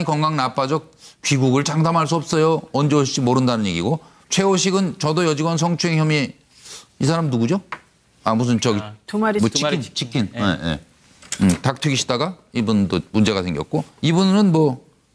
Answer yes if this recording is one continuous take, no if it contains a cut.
no